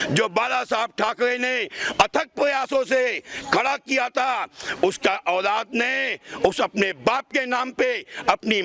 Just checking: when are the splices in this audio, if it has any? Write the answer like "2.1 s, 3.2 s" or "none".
none